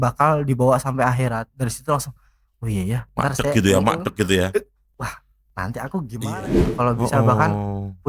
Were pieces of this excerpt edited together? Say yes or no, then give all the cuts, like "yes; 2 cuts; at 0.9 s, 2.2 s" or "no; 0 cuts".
yes; 1 cut; at 6.3 s